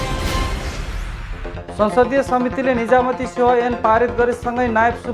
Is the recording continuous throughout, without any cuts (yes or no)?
no